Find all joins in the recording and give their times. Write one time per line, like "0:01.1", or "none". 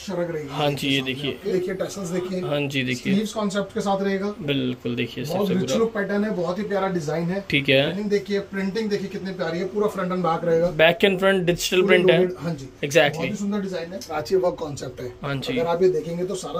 0:01.5
0:07.9
0:14.1